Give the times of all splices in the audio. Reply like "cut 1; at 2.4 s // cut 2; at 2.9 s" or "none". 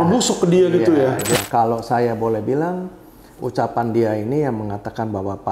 cut 1; at 1.4 s